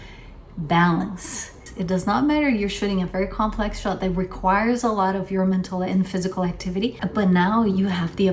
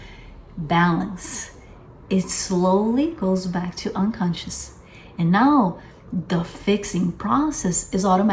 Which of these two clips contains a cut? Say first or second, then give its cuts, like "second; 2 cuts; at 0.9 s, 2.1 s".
first; 2 cuts; at 1.7 s, 7.0 s